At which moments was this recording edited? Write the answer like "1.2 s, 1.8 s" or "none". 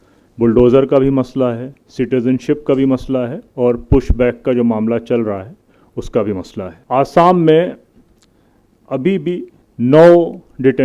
6.8 s, 9.6 s